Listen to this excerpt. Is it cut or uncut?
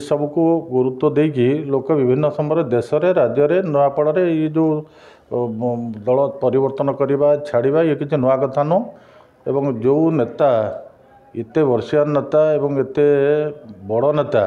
uncut